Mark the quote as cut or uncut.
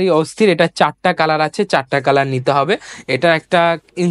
uncut